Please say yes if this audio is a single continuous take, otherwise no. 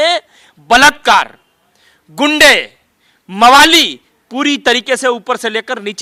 yes